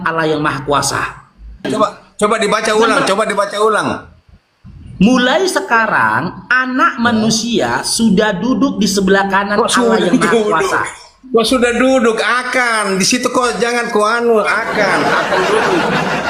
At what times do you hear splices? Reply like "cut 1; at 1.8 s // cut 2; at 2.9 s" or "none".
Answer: cut 1; at 1.7 s